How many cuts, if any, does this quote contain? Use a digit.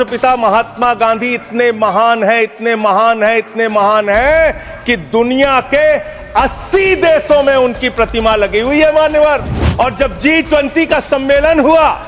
1